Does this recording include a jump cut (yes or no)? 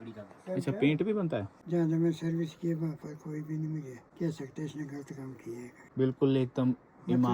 yes